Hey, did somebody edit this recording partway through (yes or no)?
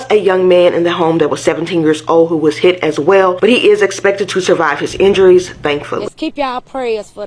yes